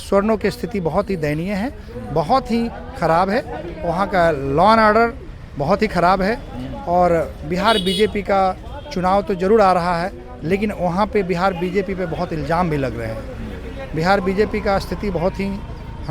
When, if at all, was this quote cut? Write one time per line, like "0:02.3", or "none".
none